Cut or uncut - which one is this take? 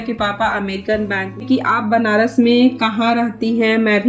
cut